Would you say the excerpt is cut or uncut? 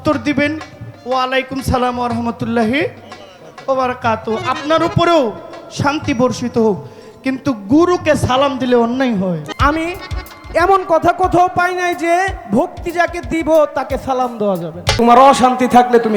cut